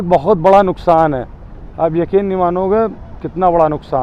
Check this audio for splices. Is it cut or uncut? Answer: uncut